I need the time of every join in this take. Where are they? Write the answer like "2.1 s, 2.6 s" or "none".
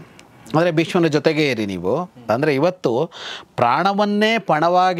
2.1 s